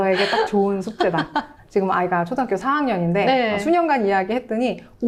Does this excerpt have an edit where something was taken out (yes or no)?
no